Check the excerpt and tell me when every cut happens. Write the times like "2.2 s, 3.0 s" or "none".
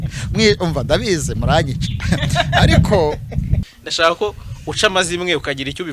3.6 s